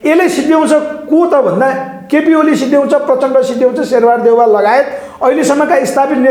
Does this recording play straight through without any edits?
yes; 0 cuts

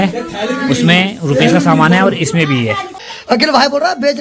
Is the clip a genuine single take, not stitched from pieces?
no; 1 cut; at 3.1 s

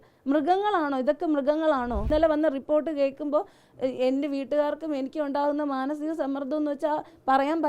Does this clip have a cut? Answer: yes; 1 cut; at 2.1 s

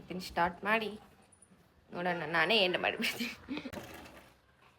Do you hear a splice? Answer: yes; 1 cut; at 3.7 s

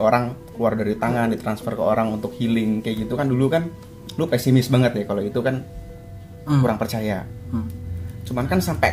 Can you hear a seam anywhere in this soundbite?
no; 0 cuts

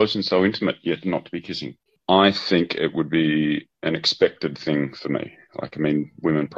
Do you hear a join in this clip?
yes; 1 cut; at 1.9 s

